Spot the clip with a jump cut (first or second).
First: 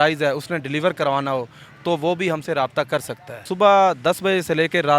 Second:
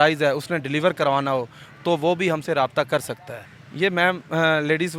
first